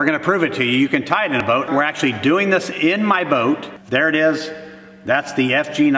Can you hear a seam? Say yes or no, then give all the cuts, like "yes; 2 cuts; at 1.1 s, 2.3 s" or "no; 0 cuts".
yes; 2 cuts; at 1.5 s, 3.8 s